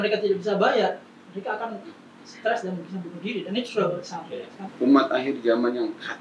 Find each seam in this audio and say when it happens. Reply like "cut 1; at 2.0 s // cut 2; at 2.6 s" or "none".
cut 1; at 4.6 s

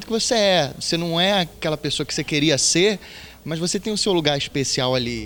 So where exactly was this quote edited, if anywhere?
none

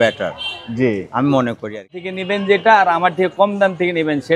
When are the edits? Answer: cut 1; at 2.0 s

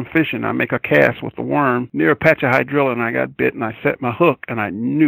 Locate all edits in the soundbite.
cut 1; at 1.9 s

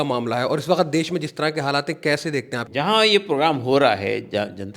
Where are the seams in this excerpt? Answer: cut 1; at 2.6 s

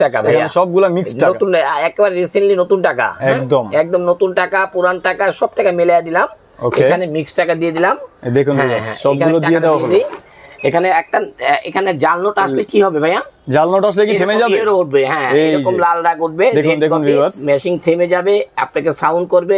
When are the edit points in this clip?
none

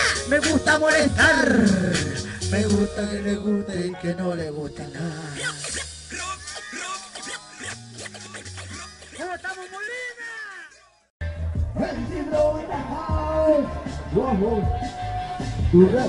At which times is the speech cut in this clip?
cut 1; at 4.1 s

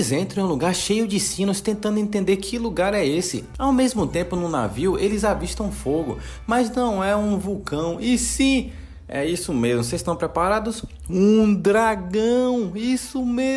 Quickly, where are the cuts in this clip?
cut 1; at 3.4 s

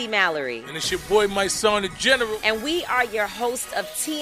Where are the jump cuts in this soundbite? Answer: none

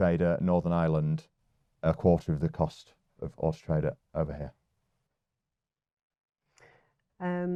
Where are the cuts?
none

